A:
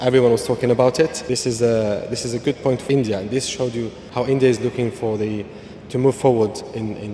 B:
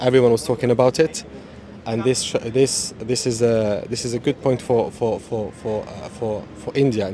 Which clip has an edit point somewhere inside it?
A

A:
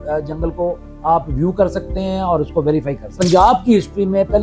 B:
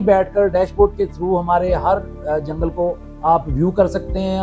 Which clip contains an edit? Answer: A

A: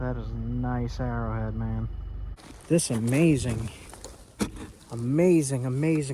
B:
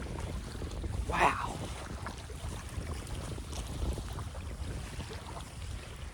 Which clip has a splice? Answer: A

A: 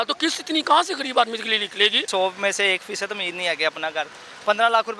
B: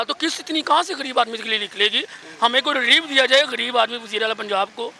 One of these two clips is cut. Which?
A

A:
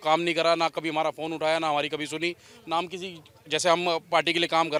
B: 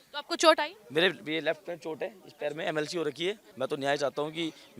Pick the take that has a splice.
B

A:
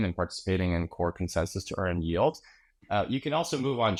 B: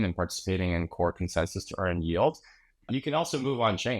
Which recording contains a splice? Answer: B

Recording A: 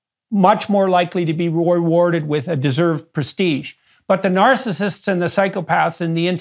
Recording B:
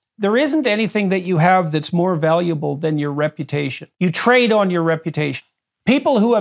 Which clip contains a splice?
B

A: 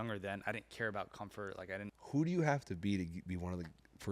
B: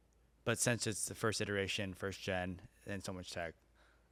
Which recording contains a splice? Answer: A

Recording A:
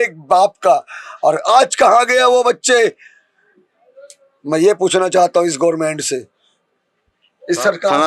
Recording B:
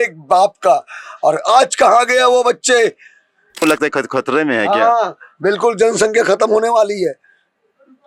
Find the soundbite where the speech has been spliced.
B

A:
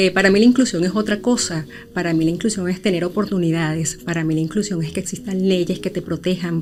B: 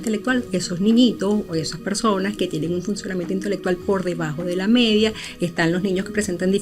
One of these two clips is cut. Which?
B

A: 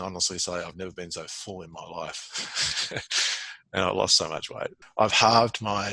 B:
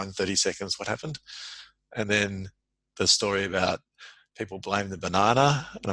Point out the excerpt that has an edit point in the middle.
A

